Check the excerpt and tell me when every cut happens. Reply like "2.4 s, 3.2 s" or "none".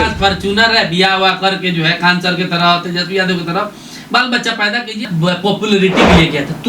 5.0 s